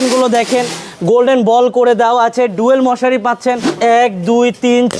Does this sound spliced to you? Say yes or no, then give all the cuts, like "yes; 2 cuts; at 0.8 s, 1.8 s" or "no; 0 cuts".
yes; 1 cut; at 3.7 s